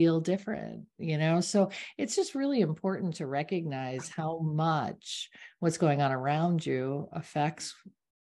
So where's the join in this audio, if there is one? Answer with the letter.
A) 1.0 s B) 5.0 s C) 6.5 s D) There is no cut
D